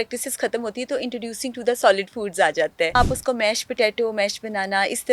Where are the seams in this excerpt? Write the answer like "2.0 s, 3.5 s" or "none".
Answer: 2.9 s